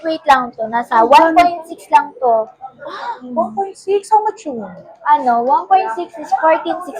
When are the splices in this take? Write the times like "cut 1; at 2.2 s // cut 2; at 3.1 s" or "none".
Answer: none